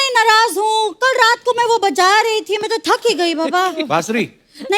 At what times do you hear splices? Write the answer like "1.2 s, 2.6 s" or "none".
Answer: none